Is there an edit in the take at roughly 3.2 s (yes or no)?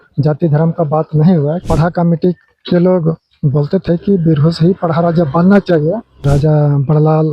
no